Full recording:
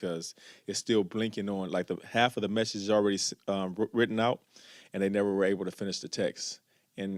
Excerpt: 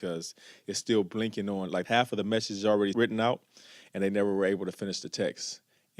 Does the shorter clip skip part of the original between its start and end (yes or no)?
yes